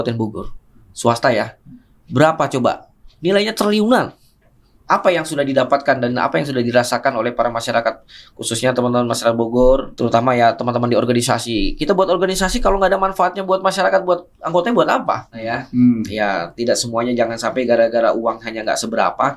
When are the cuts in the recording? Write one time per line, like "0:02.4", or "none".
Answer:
0:09.9
0:15.6